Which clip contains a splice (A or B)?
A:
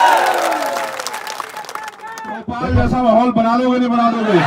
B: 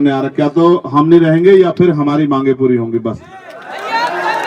A